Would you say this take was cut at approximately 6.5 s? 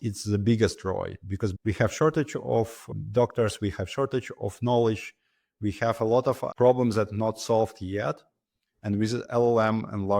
yes; 2 cuts; at 1.5 s, 6.5 s

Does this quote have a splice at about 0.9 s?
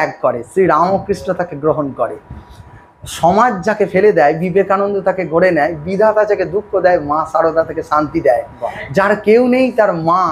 no; 0 cuts

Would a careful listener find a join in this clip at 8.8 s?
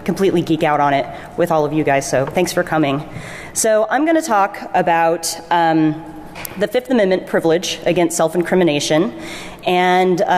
yes; 1 cut; at 8.8 s

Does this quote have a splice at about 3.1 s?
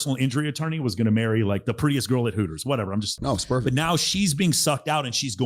yes; 1 cut; at 3.1 s

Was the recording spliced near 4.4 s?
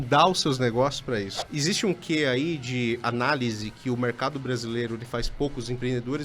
no; 1 cut; at 1.5 s

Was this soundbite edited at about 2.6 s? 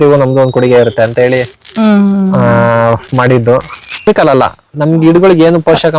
no; 1 cut; at 4.1 s

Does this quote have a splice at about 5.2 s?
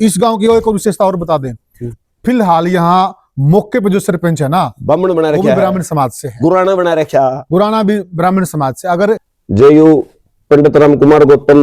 no; 1 cut; at 9.3 s

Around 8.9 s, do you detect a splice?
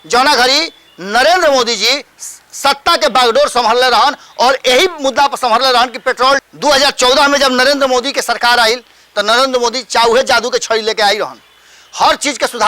no; 1 cut; at 6.4 s

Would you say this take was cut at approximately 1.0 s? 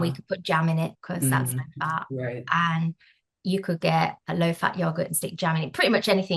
yes; 1 cut; at 1.0 s

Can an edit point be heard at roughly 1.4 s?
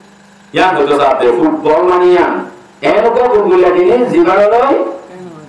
no; 0 cuts

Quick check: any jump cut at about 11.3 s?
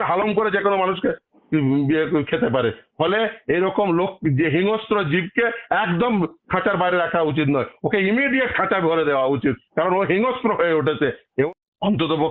yes; 1 cut; at 11.3 s

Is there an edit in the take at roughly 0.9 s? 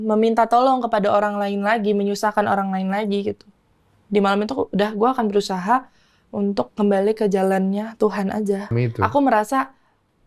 no; 1 cut; at 8.7 s

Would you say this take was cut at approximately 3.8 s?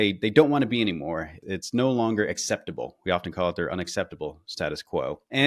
no; 1 cut; at 1.4 s

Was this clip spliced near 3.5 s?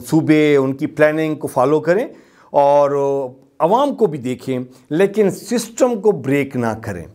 no; 0 cuts

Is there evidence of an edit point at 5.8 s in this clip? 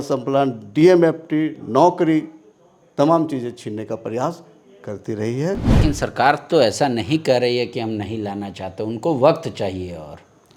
yes; 1 cut; at 5.8 s

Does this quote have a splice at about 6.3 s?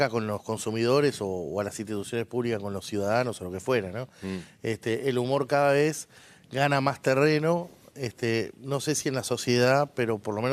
no; 1 cut; at 1.7 s

